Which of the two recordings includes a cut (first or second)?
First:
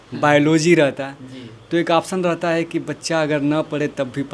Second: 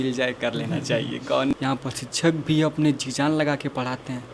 second